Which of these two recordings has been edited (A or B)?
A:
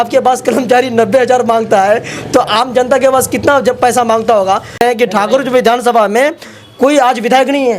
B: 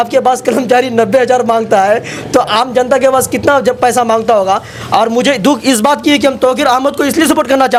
A